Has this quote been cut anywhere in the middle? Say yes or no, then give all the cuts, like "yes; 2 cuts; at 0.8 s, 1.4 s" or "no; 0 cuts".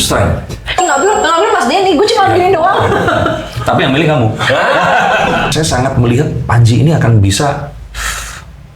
yes; 1 cut; at 5.5 s